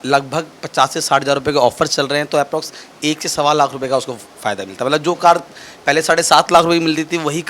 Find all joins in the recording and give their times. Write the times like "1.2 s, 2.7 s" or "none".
none